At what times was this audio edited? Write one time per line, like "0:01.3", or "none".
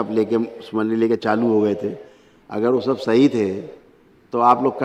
none